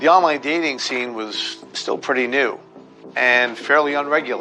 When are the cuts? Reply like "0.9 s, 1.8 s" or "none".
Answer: none